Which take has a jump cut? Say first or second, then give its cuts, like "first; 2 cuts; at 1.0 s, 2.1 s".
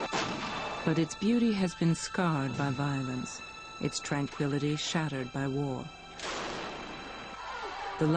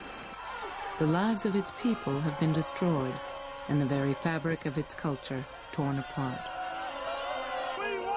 second; 1 cut; at 7.3 s